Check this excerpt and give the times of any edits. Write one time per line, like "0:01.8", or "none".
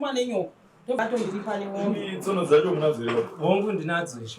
0:01.0